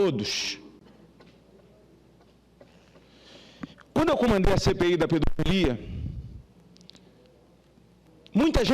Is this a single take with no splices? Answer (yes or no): no